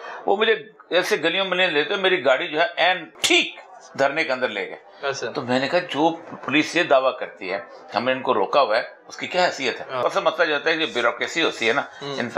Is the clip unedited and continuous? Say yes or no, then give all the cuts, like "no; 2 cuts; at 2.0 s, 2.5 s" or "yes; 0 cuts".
no; 2 cuts; at 3.1 s, 10.0 s